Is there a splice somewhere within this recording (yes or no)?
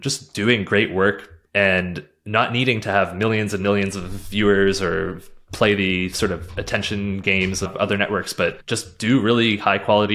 no